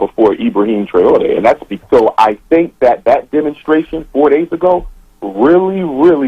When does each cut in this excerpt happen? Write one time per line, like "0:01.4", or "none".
0:01.7

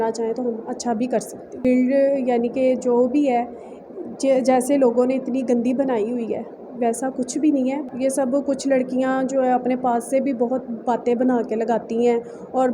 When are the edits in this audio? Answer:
0:01.6
0:07.8

